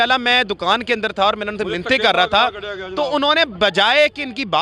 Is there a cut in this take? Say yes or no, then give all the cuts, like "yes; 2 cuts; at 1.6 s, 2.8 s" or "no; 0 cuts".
no; 0 cuts